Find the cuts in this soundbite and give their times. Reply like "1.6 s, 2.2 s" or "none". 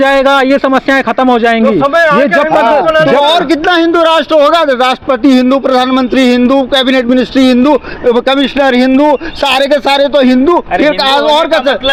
none